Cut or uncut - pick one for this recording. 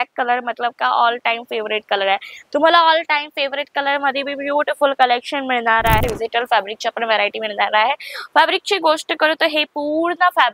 cut